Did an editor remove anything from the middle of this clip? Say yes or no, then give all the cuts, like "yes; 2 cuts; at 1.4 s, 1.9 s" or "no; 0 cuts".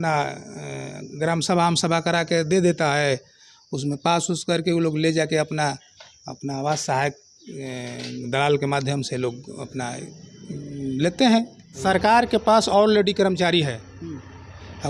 yes; 1 cut; at 11.7 s